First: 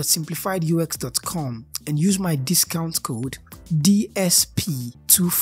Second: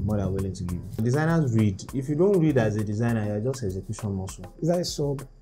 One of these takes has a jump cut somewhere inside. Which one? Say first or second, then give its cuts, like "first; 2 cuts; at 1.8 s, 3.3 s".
second; 2 cuts; at 1.0 s, 4.5 s